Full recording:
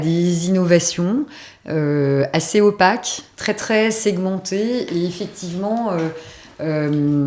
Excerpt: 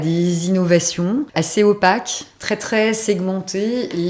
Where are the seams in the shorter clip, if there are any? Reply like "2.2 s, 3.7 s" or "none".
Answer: 1.3 s